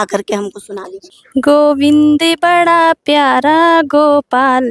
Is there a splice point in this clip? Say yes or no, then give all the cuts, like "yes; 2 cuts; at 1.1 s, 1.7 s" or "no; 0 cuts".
no; 0 cuts